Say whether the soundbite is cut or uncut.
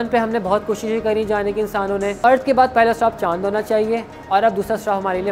cut